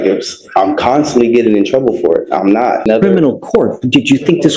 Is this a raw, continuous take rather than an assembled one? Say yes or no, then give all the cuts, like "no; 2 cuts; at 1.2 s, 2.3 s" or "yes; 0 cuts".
no; 1 cut; at 2.9 s